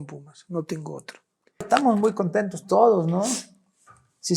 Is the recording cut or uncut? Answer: cut